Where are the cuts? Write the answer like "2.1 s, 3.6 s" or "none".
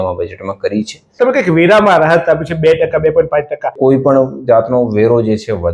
1.1 s, 3.7 s